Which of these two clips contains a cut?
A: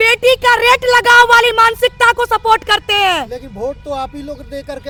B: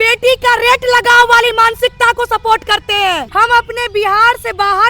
B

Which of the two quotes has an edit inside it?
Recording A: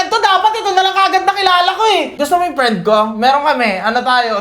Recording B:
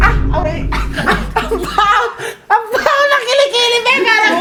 A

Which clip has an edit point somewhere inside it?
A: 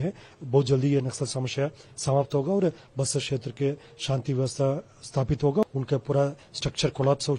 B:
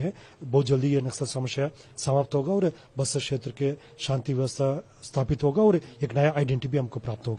A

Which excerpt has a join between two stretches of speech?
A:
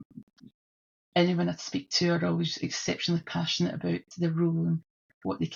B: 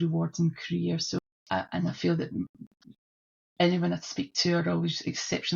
B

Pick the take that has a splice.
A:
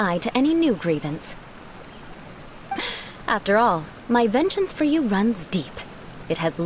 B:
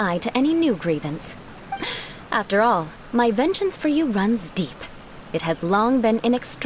B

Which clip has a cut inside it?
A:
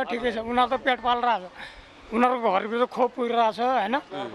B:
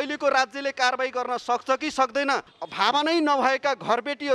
B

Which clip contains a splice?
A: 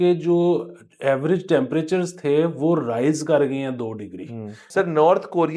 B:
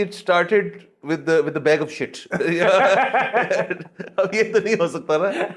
A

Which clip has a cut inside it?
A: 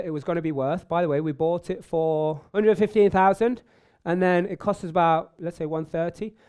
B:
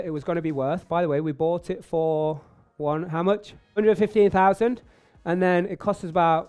A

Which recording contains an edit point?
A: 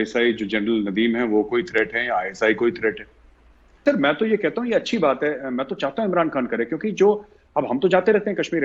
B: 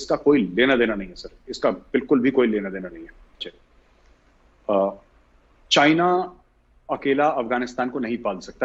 A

